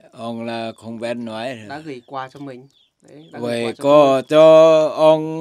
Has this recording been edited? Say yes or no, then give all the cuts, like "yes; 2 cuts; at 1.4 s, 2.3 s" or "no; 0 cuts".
no; 0 cuts